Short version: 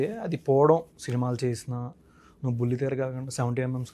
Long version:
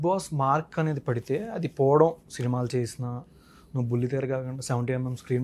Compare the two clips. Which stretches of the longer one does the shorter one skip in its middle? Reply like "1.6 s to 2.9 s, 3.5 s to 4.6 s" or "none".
none